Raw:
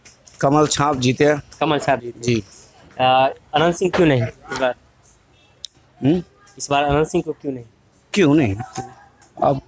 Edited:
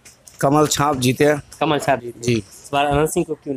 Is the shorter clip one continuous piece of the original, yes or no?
no